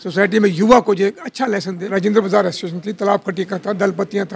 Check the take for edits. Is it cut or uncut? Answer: cut